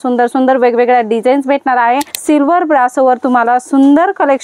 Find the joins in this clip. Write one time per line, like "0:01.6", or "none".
0:02.1